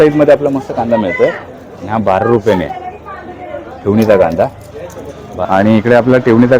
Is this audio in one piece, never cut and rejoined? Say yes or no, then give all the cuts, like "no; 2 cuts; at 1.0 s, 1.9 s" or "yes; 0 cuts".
no; 1 cut; at 5.3 s